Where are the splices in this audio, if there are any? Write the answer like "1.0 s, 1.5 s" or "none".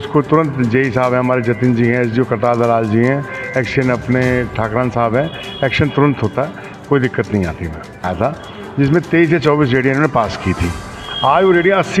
8.1 s